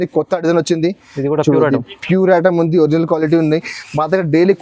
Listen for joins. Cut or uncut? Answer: uncut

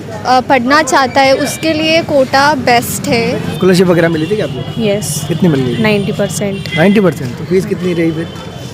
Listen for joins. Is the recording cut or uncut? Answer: cut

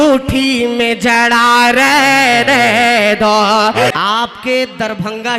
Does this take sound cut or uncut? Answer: cut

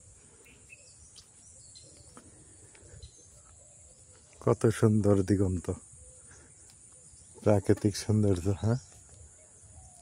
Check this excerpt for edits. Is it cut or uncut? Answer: uncut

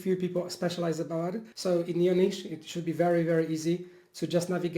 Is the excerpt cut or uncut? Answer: cut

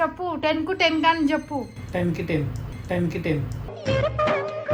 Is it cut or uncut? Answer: uncut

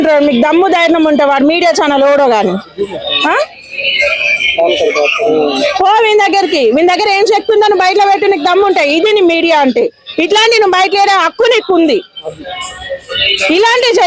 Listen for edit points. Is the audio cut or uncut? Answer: uncut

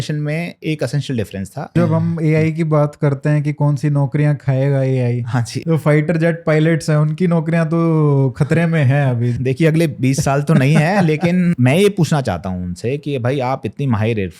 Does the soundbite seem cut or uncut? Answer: cut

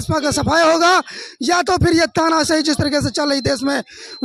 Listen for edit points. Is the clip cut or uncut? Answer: uncut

